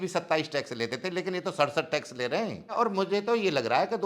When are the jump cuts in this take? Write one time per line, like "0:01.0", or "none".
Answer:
0:02.7